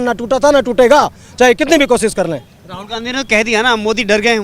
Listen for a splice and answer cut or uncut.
uncut